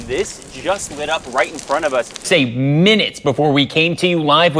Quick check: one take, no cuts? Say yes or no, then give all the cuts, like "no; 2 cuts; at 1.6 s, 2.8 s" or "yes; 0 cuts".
no; 1 cut; at 2.3 s